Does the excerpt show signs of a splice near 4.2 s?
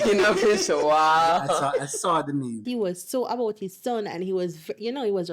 no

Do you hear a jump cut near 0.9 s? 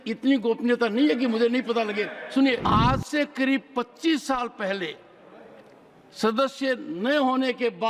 no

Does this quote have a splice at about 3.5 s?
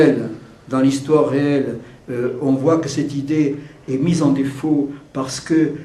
yes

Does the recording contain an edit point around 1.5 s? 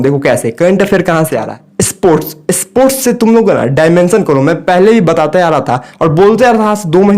yes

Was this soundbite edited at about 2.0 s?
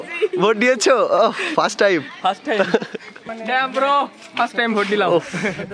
no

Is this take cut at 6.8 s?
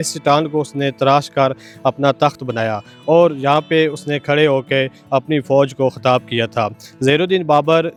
no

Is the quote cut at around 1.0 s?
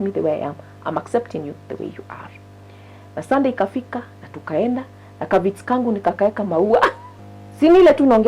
no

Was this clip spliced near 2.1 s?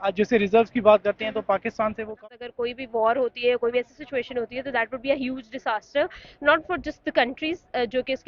yes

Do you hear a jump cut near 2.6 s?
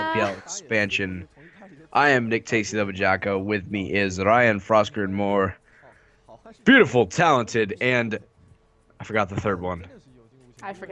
yes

